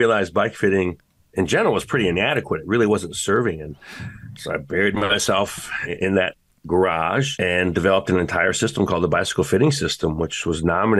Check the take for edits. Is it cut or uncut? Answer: cut